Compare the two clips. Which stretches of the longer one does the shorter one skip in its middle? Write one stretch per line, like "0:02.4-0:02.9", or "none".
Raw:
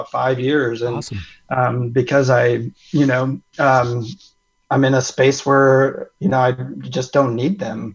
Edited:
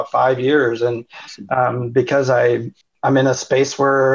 0:02.8-0:04.4